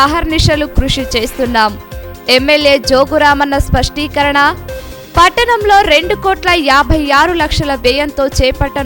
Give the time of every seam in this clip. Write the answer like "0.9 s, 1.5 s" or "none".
none